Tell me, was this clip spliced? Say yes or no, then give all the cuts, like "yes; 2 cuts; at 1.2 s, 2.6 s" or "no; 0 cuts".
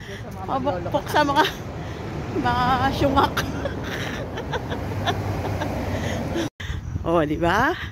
yes; 1 cut; at 6.6 s